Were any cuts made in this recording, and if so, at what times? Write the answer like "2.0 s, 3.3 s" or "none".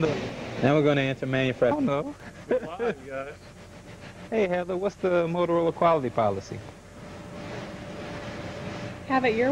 1.7 s